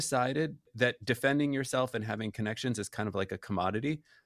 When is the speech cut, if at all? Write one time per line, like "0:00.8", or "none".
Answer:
none